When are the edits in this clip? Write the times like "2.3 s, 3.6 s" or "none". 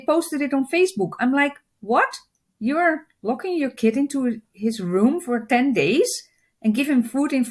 none